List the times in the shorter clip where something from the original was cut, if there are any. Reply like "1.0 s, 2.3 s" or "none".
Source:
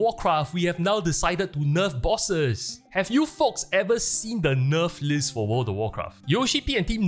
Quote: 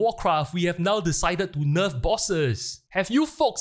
none